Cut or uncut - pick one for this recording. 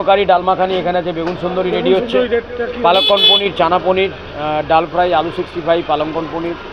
uncut